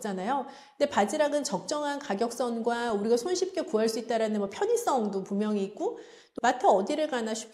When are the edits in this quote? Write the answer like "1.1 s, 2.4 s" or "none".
6.2 s